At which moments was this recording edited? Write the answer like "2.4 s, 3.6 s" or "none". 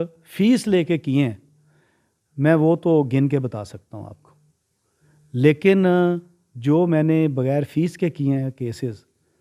none